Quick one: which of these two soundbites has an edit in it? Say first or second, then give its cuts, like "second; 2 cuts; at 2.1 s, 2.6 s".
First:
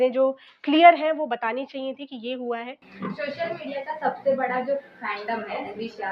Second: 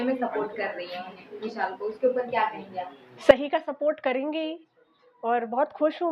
first; 1 cut; at 2.8 s